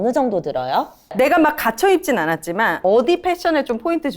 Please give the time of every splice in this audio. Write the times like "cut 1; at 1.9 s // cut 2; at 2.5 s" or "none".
cut 1; at 1.1 s // cut 2; at 2.8 s